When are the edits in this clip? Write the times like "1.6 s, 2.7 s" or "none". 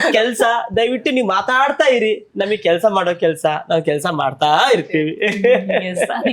none